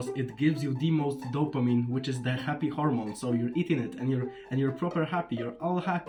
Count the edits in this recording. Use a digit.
0